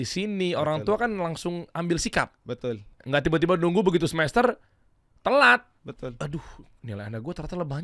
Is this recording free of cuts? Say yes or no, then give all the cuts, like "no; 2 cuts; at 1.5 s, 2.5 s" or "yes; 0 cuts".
no; 1 cut; at 2.9 s